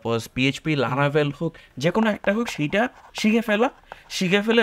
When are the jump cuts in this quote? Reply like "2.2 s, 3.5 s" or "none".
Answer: 1.7 s